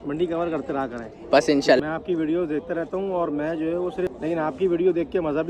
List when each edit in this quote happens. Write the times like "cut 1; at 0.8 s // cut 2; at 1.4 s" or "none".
cut 1; at 1.8 s // cut 2; at 4.1 s